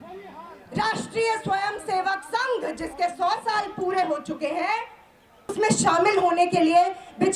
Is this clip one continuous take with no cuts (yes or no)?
no